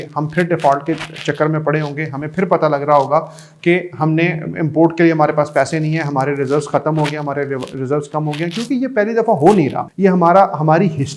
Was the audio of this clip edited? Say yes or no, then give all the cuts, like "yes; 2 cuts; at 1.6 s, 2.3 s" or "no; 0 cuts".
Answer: yes; 1 cut; at 9.8 s